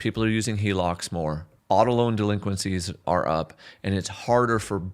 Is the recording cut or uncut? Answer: cut